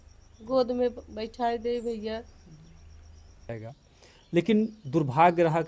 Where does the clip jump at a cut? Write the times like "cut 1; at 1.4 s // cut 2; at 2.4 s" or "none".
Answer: cut 1; at 3.5 s